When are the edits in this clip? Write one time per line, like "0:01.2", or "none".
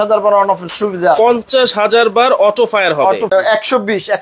0:03.3